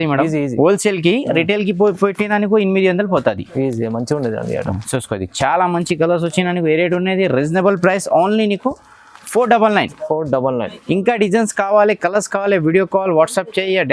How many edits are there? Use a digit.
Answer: 0